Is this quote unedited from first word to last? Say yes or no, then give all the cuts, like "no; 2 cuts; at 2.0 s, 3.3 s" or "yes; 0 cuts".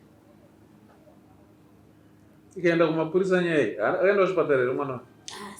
yes; 0 cuts